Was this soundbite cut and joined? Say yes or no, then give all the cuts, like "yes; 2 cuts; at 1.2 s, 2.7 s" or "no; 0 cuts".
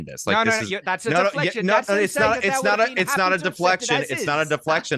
no; 0 cuts